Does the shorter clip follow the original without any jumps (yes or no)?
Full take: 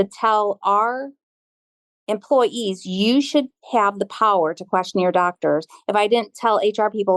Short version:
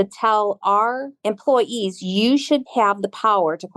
no